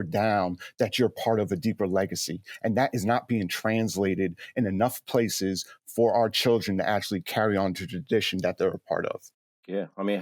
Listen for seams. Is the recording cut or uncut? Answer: uncut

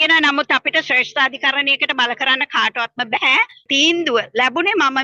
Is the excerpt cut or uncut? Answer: cut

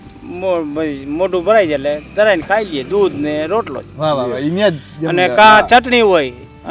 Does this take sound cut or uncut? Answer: uncut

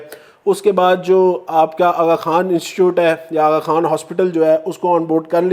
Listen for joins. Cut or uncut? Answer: uncut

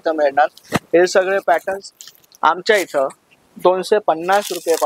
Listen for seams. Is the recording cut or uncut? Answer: uncut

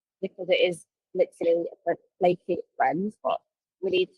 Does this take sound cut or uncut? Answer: cut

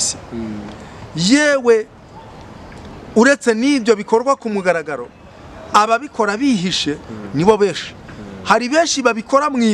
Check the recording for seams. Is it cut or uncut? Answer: uncut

